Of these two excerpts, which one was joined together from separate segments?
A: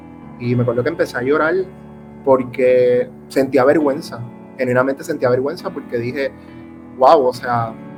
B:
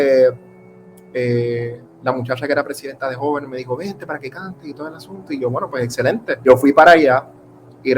B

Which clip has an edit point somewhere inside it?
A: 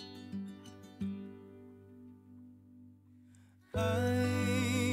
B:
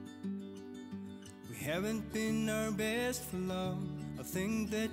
B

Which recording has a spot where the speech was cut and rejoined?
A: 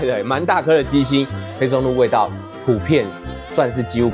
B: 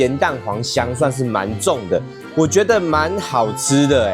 A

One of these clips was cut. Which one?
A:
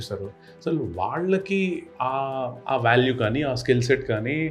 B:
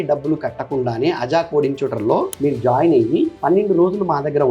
B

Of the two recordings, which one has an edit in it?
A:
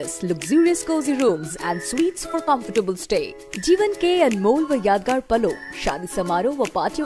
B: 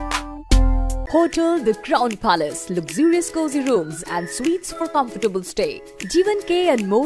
B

